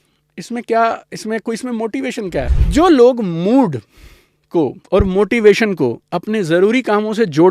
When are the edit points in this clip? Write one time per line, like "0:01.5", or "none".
0:02.5